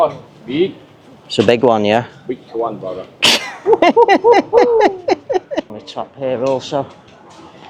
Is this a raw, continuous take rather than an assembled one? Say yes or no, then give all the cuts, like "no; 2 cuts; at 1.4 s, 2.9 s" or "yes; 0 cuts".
no; 1 cut; at 5.7 s